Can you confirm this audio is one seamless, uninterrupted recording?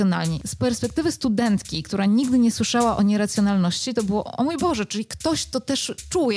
yes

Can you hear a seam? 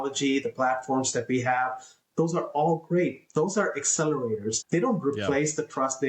no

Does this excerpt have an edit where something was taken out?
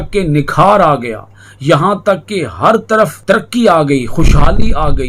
yes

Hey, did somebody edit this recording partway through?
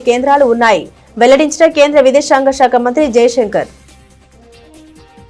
no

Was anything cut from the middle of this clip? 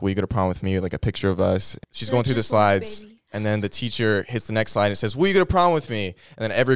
yes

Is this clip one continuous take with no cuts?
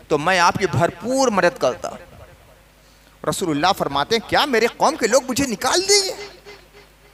yes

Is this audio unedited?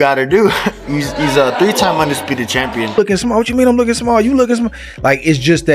no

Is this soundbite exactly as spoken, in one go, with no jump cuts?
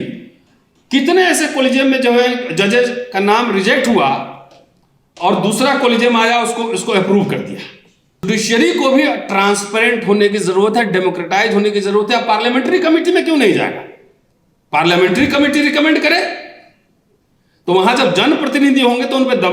no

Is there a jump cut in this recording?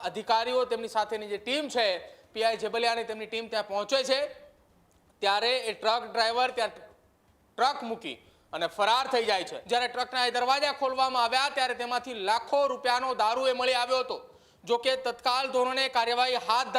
yes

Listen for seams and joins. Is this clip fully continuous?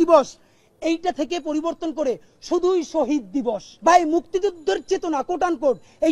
no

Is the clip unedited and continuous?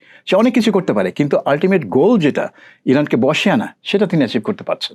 yes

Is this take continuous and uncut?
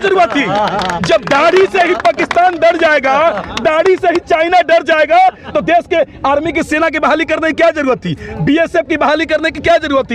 yes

